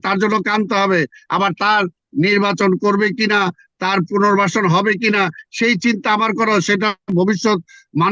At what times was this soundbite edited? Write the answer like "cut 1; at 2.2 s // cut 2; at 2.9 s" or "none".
none